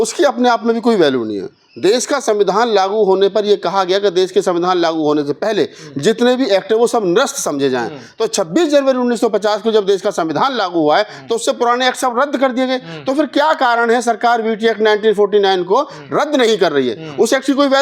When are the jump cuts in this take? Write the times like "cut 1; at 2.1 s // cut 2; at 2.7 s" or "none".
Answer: none